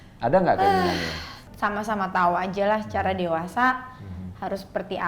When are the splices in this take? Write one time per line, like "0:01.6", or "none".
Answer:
0:01.4